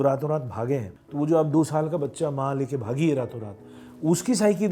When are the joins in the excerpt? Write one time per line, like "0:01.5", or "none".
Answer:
0:01.0